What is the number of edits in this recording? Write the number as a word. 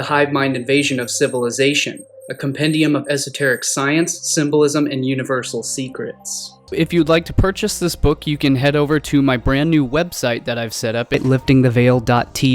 one